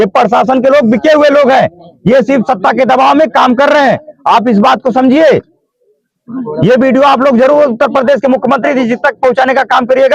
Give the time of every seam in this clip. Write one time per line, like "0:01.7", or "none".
none